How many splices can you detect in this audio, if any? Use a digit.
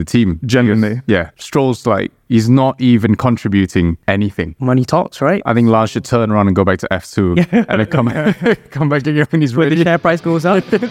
1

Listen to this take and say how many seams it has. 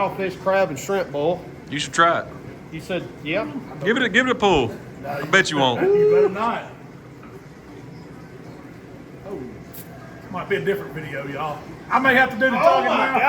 1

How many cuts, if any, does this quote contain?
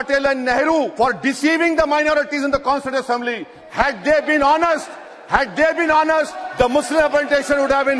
1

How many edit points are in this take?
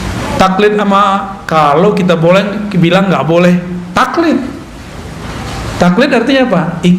1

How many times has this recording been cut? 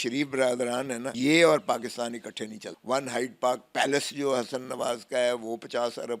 2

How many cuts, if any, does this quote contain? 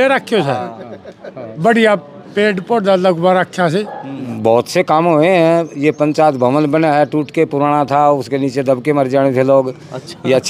1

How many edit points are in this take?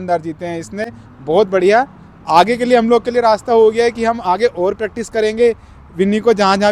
0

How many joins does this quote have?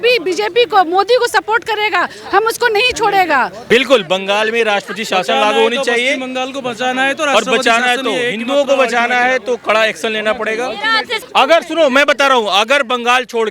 2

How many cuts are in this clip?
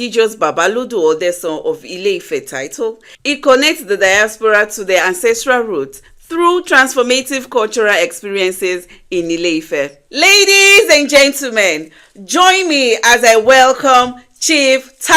2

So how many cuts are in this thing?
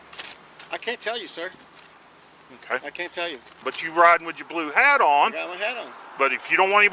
1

